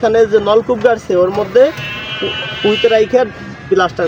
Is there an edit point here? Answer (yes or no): no